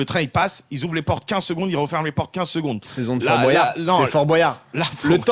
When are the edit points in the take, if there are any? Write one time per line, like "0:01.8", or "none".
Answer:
none